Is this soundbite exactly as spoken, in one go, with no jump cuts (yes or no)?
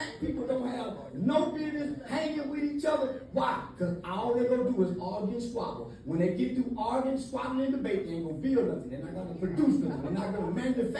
yes